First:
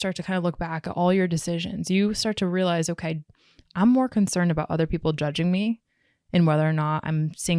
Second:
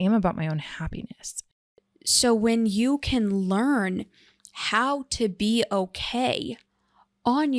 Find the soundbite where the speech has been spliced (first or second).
second